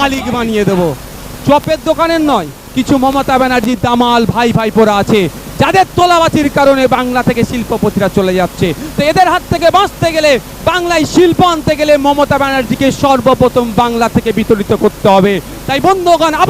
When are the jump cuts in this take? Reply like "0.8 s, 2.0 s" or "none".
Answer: 2.6 s